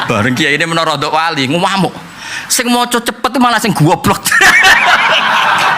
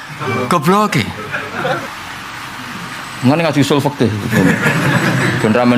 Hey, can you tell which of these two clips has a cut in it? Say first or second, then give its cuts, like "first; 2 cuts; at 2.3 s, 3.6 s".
second; 1 cut; at 1.9 s